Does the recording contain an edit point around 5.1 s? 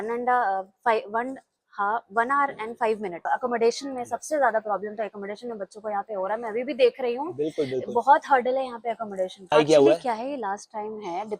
no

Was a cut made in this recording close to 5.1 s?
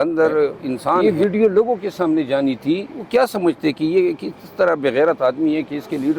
no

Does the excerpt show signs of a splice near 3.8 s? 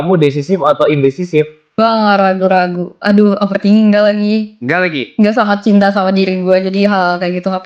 no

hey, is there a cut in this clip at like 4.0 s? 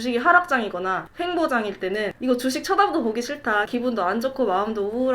no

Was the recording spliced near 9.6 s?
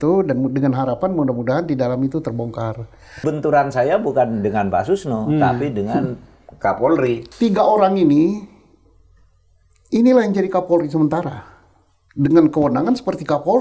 no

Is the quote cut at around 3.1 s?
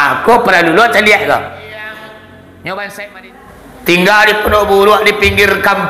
yes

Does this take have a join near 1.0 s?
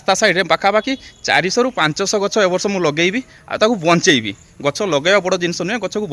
no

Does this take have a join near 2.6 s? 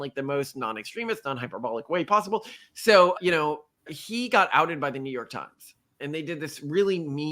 yes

